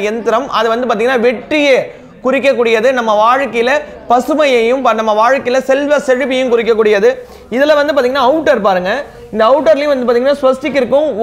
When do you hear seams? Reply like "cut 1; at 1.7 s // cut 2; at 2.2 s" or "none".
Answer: none